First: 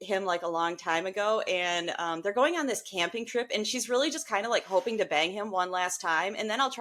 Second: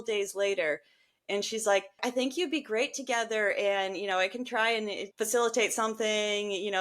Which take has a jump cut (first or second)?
second